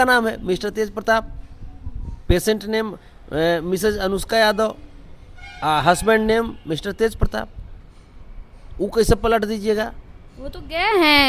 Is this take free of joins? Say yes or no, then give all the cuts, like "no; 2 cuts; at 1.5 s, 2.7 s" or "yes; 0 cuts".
yes; 0 cuts